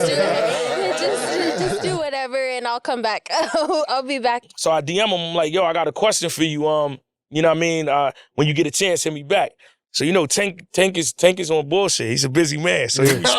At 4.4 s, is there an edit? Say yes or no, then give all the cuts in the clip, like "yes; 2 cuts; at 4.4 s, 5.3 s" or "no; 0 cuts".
yes; 1 cut; at 4.4 s